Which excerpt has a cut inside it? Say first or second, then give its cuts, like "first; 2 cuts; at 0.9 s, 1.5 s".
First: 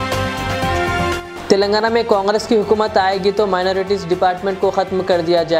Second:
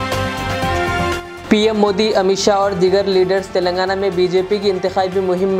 first; 1 cut; at 0.9 s